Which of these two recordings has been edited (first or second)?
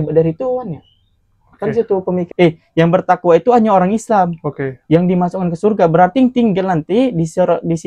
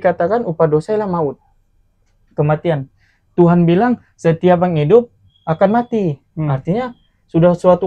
first